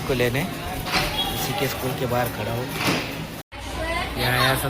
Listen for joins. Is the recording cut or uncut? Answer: cut